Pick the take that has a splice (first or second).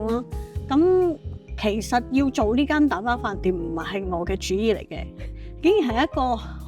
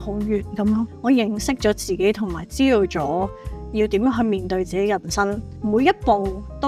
second